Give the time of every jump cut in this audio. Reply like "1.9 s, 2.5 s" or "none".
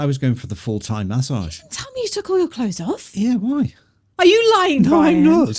none